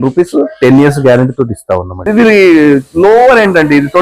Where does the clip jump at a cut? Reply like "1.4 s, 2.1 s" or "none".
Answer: 2.1 s